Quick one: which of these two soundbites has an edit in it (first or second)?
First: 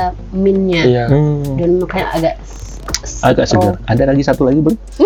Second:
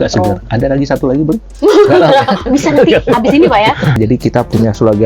second